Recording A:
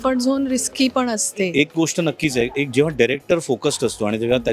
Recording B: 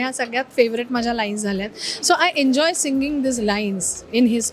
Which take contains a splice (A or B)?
A